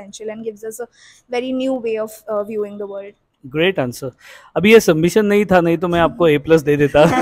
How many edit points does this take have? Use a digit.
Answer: 0